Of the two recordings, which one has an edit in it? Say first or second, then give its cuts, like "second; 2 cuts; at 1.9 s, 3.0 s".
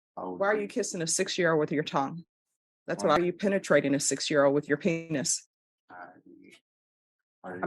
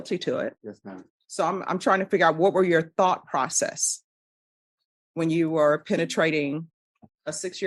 first; 1 cut; at 3.2 s